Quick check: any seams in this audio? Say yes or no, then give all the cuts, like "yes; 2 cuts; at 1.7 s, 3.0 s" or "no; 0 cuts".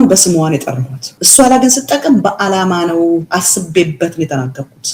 no; 0 cuts